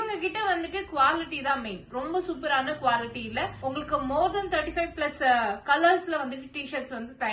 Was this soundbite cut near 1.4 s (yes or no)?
no